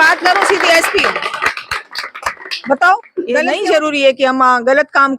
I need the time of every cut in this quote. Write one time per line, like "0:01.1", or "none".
0:03.5